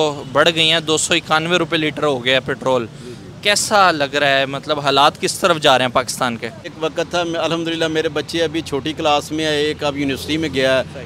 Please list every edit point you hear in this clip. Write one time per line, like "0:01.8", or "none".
0:06.7